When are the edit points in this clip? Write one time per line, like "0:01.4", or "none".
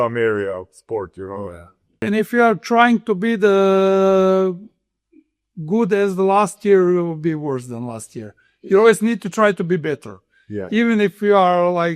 0:02.0